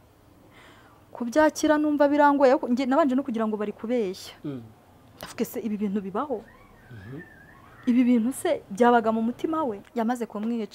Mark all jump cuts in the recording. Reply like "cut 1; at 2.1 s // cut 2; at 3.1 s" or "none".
cut 1; at 9.8 s